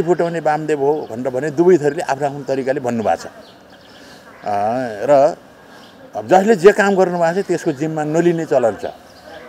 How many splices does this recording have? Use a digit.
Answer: 0